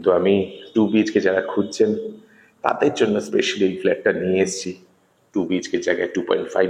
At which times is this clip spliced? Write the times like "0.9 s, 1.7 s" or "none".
none